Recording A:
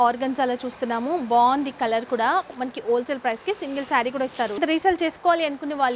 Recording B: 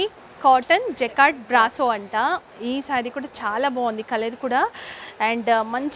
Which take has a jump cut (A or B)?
A